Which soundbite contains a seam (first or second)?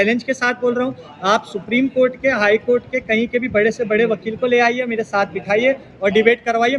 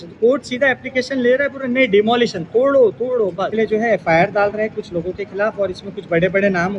second